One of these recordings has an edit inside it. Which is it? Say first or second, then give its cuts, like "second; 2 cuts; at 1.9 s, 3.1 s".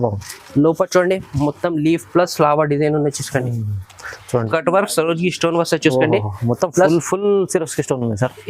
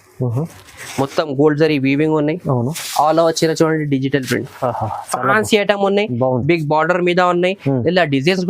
first; 1 cut; at 4.5 s